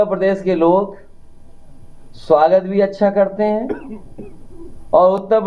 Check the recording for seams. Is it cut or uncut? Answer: uncut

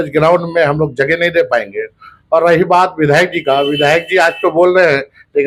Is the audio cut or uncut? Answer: uncut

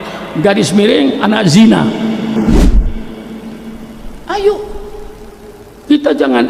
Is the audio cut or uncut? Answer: uncut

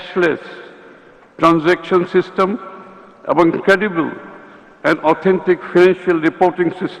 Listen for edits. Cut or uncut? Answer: uncut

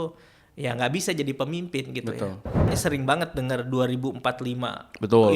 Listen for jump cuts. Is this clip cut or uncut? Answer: cut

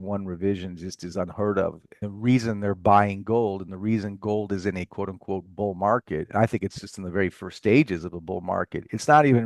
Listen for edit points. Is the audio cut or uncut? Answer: cut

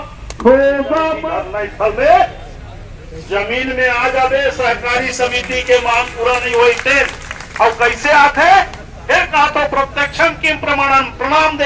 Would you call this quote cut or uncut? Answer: cut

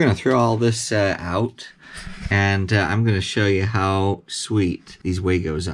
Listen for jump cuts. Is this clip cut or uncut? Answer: uncut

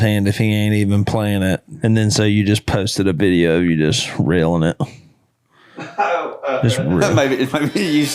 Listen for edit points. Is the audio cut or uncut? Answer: cut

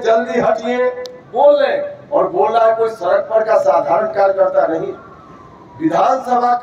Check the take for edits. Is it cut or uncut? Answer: uncut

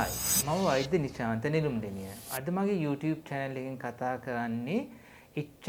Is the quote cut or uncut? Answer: uncut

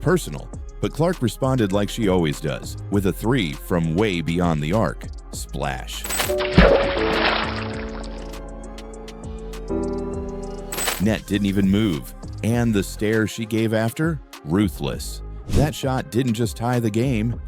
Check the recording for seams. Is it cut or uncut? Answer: uncut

